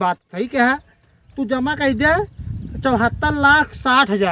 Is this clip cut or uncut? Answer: uncut